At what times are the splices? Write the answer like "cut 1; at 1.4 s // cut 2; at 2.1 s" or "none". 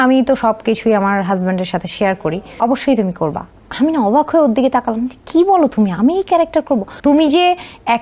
cut 1; at 2.6 s // cut 2; at 6.9 s

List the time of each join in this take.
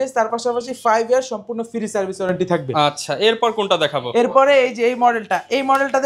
none

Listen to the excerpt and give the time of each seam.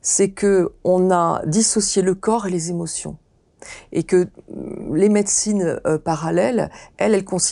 none

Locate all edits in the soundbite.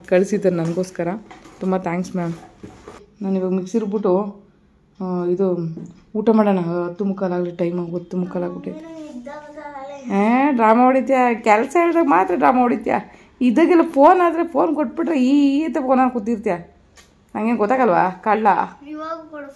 cut 1; at 3.0 s

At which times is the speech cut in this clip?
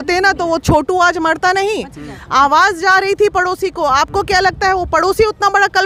none

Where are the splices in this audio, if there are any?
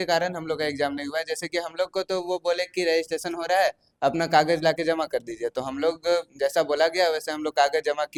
none

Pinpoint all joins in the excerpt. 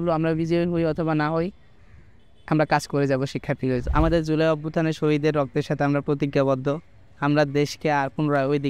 cut 1; at 3.9 s

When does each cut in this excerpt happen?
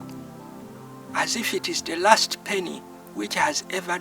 cut 1; at 1.1 s

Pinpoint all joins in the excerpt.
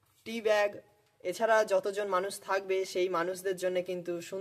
none

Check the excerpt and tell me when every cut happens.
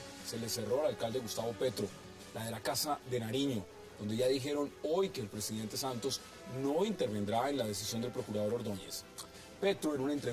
none

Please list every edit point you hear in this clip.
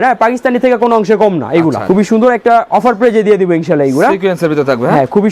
cut 1; at 1.8 s

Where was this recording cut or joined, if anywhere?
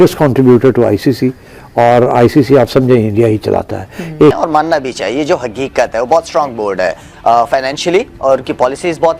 cut 1; at 4.3 s

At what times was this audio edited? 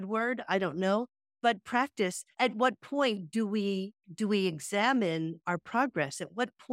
cut 1; at 1.2 s // cut 2; at 2.3 s

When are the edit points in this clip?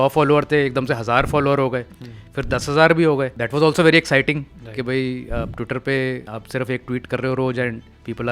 cut 1; at 3.4 s // cut 2; at 6.3 s

